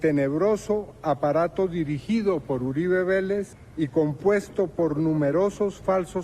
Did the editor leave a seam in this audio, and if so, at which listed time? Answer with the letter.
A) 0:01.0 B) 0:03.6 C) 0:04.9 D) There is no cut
B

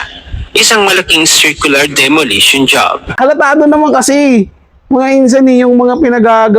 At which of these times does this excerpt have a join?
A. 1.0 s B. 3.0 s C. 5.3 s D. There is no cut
B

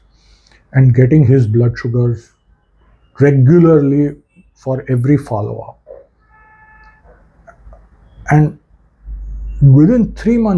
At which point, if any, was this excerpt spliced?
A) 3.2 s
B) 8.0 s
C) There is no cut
C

